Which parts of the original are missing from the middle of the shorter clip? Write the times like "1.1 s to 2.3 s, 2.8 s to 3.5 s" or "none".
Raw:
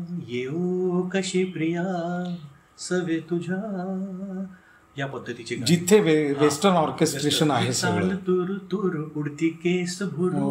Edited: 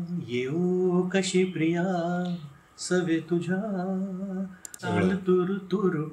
4.8 s to 7.8 s

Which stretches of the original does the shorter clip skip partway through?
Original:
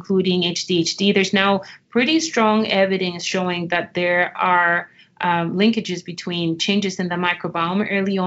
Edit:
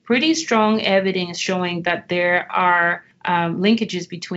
4.9 s to 5.0 s

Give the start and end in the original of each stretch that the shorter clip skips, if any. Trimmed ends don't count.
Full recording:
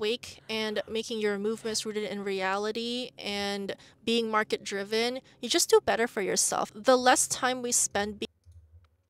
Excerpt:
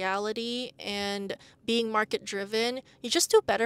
none

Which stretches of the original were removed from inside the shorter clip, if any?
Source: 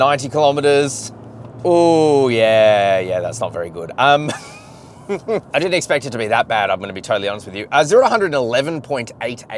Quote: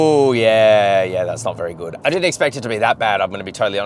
3.9 s to 5.5 s

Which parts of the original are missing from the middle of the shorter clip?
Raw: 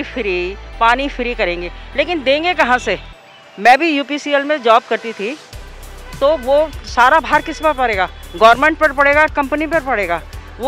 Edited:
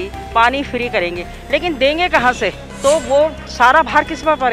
3.1 s to 6.0 s

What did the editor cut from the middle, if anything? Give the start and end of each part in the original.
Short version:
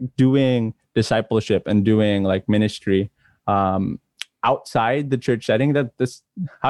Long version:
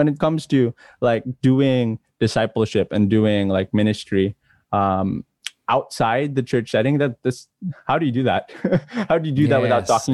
none

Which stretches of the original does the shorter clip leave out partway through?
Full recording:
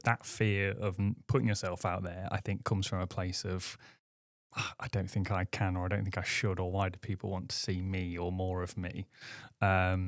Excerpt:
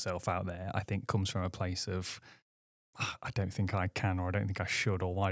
none

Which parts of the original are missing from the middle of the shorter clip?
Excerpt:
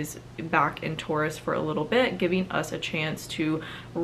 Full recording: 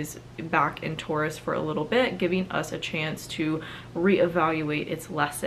none

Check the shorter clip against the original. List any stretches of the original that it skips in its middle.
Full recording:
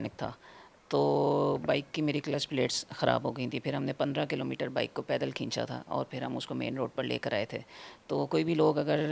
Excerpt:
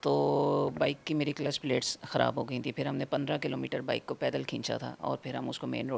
none

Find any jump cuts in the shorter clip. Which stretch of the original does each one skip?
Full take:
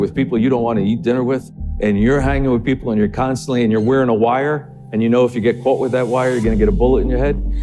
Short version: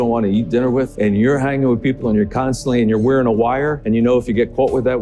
1.5 s to 1.7 s, 4.6 s to 4.8 s

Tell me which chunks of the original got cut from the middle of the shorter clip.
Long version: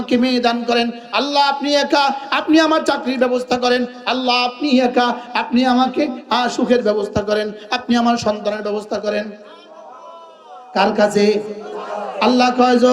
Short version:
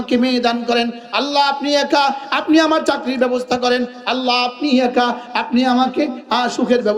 none

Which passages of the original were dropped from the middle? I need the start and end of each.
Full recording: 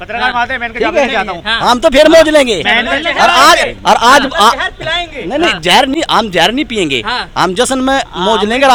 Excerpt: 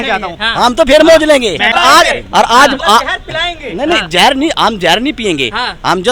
2.8 s to 3.3 s

